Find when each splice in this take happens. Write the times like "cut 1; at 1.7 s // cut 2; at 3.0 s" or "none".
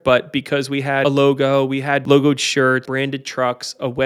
cut 1; at 1.0 s // cut 2; at 2.0 s // cut 3; at 2.9 s